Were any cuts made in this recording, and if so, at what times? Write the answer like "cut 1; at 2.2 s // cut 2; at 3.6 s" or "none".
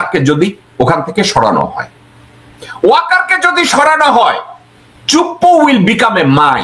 none